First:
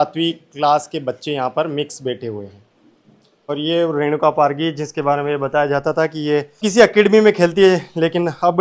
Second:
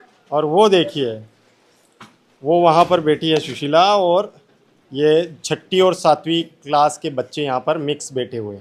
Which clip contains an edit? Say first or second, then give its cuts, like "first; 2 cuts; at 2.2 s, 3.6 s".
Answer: first; 2 cuts; at 3.5 s, 6.5 s